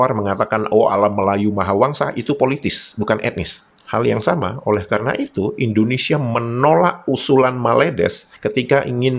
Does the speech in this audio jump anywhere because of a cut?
yes; 1 cut; at 3.6 s

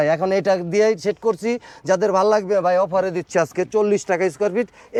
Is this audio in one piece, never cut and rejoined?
yes; 0 cuts

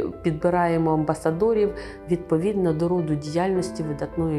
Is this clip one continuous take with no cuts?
yes; 0 cuts

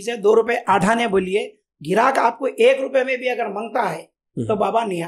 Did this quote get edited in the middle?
no; 0 cuts

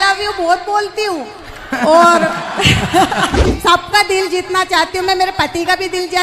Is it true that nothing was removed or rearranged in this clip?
no; 1 cut; at 3.4 s

